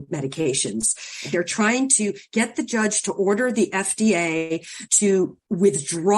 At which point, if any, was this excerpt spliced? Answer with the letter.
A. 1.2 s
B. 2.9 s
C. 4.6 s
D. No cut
A